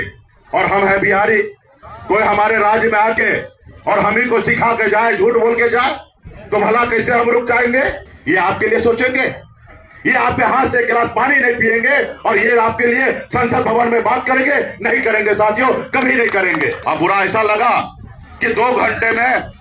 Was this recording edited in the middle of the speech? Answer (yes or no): yes